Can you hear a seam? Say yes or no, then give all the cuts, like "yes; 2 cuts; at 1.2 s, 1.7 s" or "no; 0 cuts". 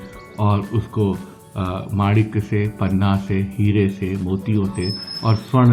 no; 0 cuts